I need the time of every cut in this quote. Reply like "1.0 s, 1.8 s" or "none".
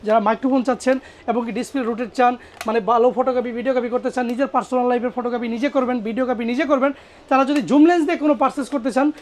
none